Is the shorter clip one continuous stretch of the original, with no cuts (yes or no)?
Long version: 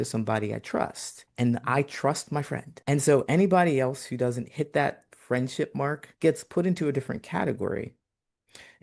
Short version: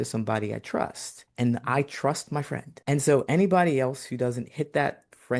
yes